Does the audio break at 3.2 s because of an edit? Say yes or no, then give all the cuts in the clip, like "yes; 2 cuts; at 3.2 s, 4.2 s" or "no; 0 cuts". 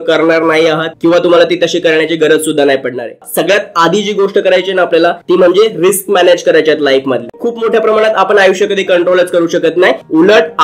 yes; 2 cuts; at 3.2 s, 7.3 s